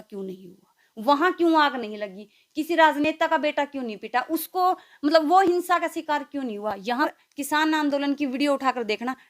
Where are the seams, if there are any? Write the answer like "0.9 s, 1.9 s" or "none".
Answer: 7.1 s